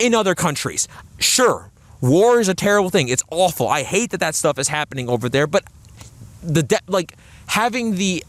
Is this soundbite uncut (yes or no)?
yes